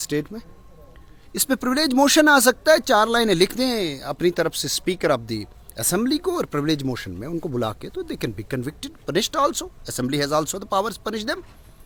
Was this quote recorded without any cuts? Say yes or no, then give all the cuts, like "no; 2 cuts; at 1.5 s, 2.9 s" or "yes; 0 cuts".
yes; 0 cuts